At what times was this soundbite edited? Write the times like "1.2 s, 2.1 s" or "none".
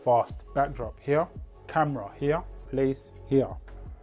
2.6 s